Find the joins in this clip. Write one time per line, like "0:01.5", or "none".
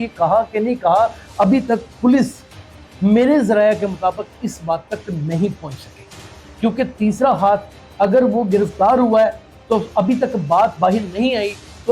none